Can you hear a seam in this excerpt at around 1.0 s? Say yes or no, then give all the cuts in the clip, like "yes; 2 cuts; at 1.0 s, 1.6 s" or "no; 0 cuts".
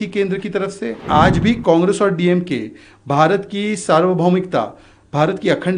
yes; 1 cut; at 1.0 s